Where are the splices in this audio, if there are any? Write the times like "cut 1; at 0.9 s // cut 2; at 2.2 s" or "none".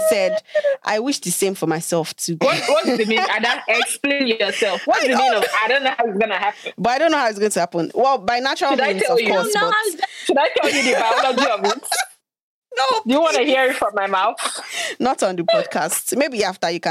cut 1; at 2.4 s